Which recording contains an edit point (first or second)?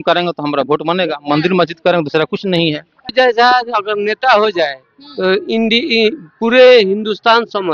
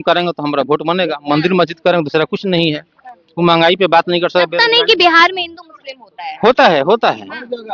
first